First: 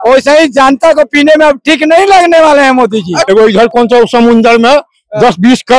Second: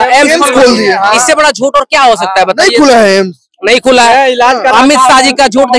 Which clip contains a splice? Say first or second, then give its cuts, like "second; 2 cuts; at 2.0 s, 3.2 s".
first; 1 cut; at 3.2 s